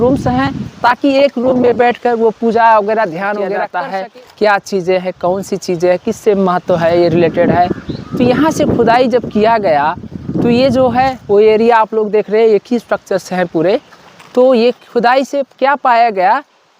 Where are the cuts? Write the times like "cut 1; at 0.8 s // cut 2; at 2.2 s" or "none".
cut 1; at 3.6 s